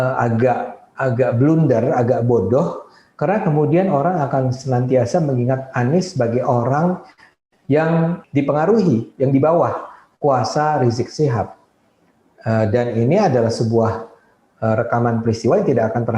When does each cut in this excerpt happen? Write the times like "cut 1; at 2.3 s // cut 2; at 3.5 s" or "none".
cut 1; at 8.2 s